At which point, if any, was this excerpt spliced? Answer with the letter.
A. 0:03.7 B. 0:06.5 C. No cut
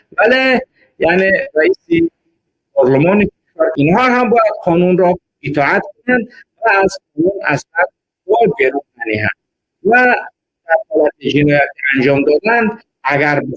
A